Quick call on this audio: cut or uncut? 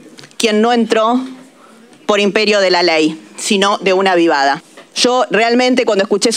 cut